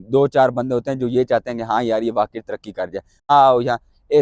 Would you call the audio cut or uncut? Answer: cut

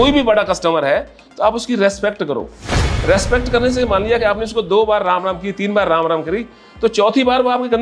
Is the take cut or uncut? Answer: uncut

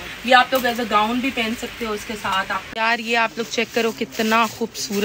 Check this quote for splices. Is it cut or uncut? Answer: cut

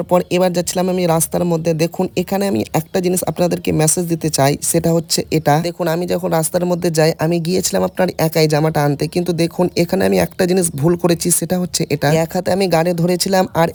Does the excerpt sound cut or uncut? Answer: uncut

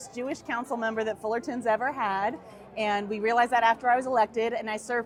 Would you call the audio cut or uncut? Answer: uncut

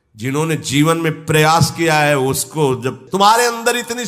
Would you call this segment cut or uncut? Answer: cut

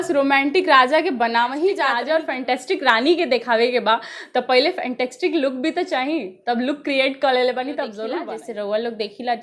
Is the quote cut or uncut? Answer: cut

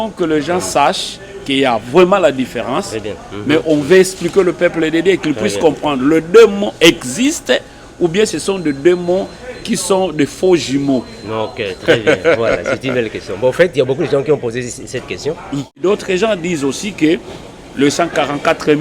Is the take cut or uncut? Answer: cut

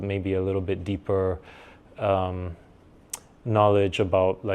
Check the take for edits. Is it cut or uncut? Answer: uncut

